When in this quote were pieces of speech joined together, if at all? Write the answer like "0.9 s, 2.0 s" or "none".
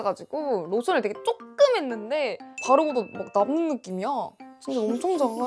none